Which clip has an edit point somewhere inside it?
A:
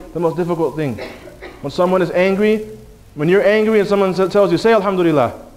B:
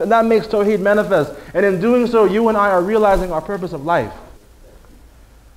B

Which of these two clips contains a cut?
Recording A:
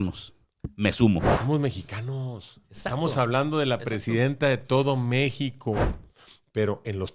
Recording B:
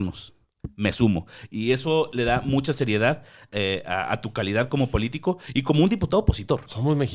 A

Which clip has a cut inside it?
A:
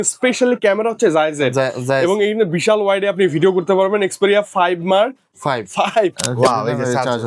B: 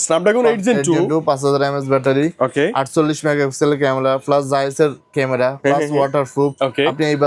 A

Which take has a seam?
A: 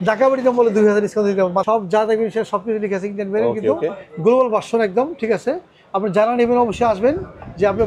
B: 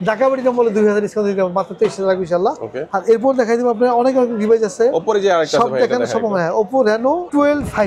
A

